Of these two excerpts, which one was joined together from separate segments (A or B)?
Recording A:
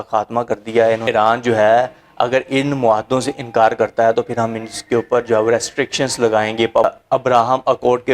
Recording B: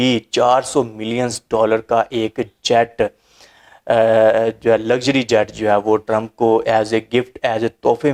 A